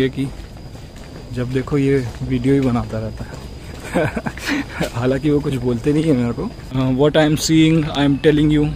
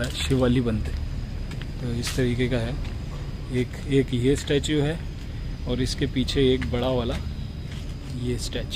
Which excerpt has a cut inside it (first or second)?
first